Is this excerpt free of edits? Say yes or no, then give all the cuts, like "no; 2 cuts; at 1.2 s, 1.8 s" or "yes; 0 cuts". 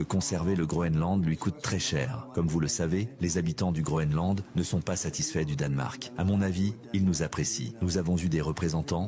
no; 1 cut; at 6.0 s